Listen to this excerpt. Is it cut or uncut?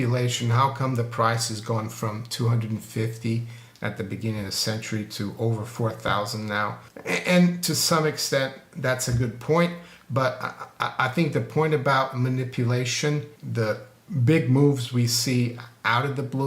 cut